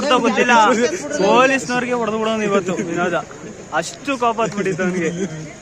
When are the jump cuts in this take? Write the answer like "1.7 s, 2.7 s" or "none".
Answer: 4.0 s